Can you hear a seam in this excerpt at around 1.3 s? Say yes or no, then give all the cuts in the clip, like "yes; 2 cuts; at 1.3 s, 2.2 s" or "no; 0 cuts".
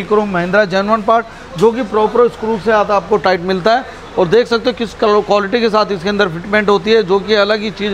no; 0 cuts